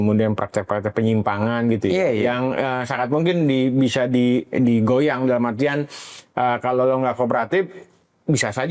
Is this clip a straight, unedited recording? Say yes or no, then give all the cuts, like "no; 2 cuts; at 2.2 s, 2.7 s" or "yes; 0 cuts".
yes; 0 cuts